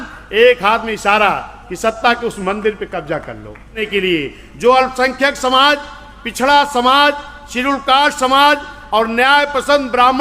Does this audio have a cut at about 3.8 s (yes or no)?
yes